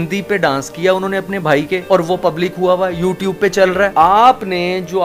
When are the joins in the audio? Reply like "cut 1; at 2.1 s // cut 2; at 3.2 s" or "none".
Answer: cut 1; at 3.9 s